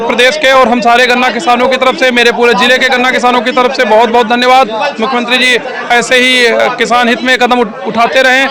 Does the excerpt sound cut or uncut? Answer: uncut